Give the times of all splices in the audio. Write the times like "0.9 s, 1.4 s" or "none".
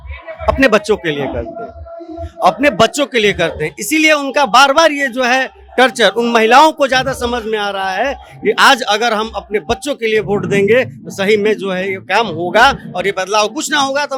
none